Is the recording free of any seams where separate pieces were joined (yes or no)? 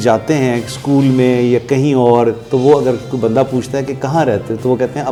yes